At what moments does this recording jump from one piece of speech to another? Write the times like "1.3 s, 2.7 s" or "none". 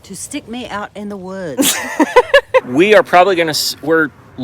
2.7 s